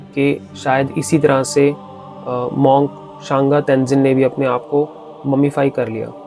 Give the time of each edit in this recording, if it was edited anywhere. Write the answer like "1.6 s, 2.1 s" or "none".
none